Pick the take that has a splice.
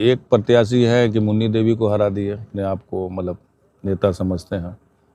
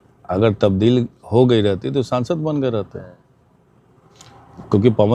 first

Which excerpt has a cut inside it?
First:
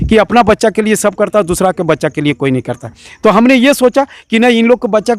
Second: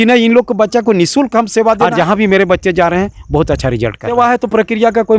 second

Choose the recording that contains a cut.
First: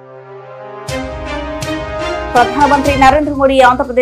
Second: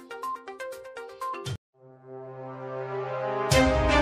first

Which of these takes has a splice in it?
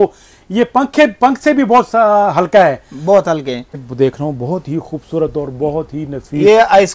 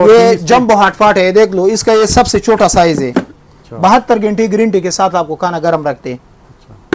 first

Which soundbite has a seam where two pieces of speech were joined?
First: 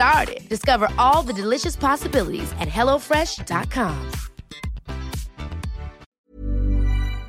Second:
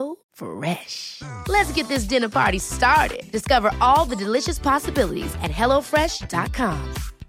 first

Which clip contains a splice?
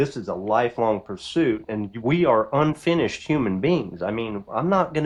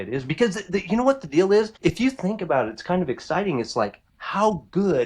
second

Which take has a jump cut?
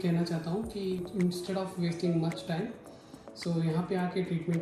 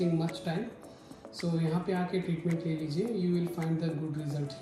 first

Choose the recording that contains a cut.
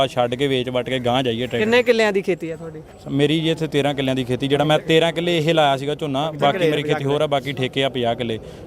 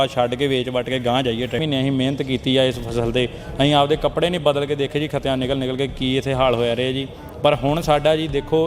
second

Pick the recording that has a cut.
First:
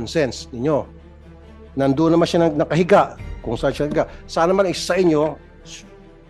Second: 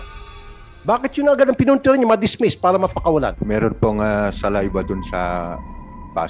second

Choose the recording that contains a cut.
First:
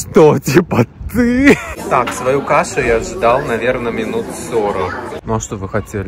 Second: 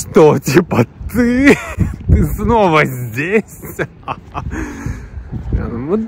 first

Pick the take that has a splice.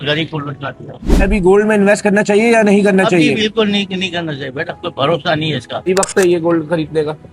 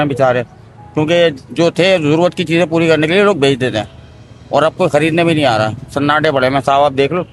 first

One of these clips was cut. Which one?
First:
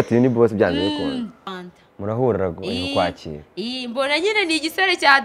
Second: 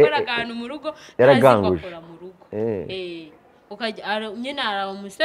first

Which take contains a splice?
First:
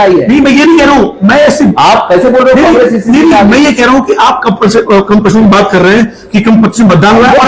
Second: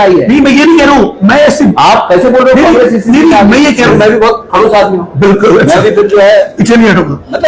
second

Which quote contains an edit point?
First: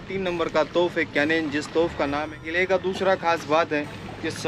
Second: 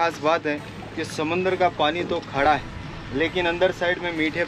first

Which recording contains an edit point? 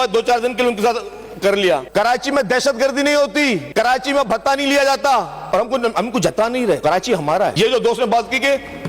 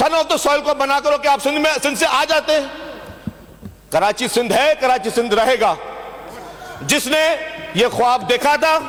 first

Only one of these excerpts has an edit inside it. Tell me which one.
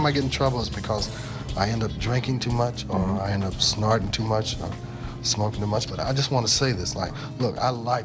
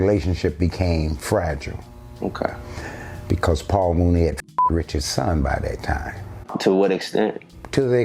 second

